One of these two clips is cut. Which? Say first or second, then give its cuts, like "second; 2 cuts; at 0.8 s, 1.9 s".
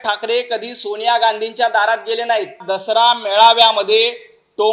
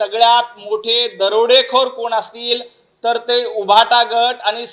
first; 1 cut; at 2.7 s